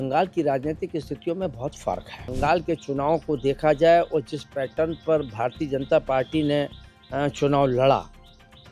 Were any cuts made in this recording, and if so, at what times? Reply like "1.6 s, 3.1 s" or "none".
2.3 s